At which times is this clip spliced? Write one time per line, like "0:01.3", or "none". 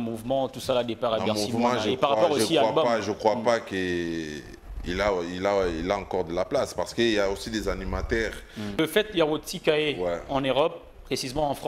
0:08.8